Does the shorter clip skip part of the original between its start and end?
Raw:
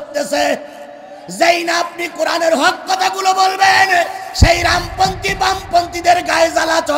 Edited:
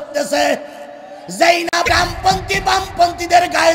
yes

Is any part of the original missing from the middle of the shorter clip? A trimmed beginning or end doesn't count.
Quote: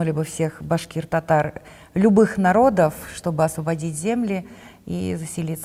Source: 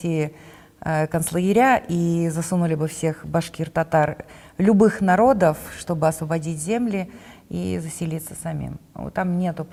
no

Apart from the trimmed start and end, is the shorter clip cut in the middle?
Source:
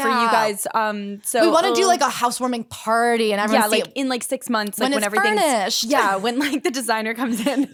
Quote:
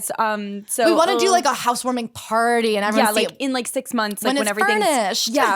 no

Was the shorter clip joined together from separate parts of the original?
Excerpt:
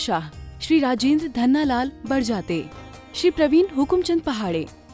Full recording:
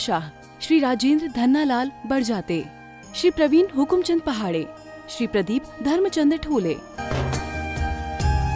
no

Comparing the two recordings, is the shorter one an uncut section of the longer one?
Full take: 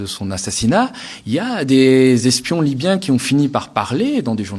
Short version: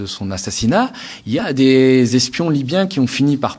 no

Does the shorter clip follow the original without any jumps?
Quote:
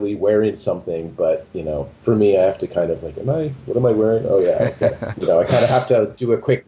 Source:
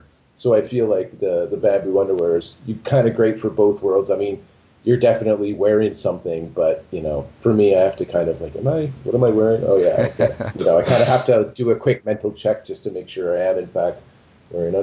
yes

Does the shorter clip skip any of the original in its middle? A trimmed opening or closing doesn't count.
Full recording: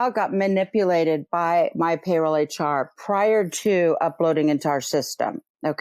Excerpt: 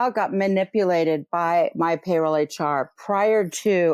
no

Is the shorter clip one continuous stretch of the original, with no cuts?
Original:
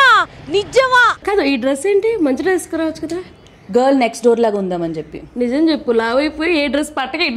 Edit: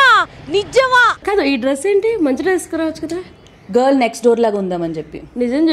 yes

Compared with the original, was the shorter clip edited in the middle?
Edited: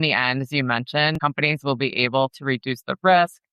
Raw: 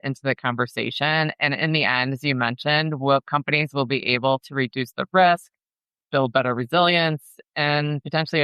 yes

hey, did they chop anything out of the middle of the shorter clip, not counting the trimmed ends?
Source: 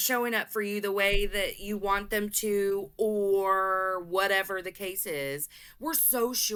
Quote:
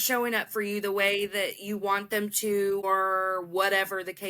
yes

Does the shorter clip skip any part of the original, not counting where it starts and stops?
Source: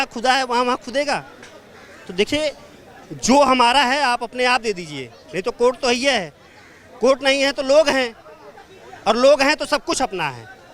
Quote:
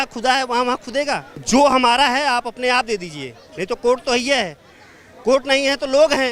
yes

